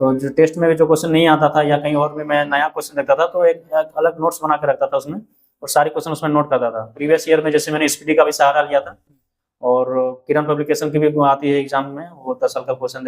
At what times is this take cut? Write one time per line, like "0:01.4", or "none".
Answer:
0:06.9